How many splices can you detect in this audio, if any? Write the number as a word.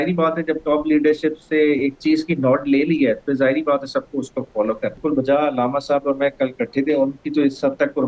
one